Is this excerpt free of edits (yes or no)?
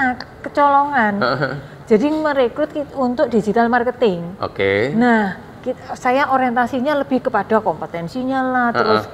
yes